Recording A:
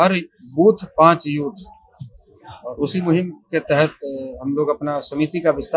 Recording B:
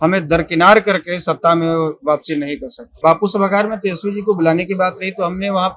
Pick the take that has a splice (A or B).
B